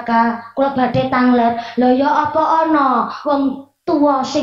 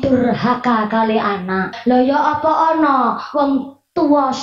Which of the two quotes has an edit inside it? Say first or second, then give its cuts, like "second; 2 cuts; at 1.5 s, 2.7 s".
second; 1 cut; at 1.7 s